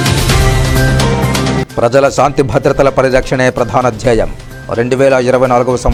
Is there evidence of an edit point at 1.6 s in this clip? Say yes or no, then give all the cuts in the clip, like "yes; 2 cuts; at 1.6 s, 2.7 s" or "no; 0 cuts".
no; 0 cuts